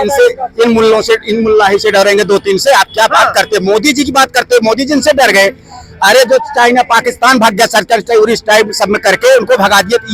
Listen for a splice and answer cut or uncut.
uncut